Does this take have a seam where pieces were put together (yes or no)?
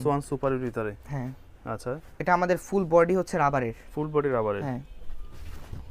no